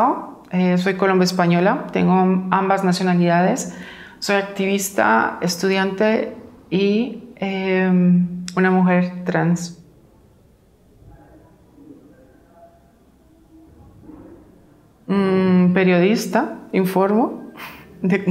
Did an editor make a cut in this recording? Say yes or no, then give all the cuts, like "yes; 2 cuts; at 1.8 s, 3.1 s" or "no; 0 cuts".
yes; 1 cut; at 1.5 s